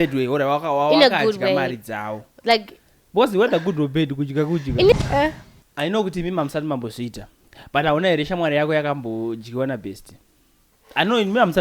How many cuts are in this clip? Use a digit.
1